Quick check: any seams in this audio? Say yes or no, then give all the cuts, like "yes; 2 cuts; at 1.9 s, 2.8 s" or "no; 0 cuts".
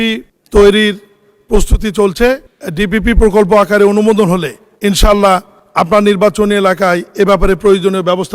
no; 0 cuts